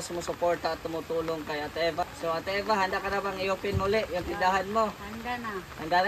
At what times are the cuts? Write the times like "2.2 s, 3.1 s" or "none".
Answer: 2.0 s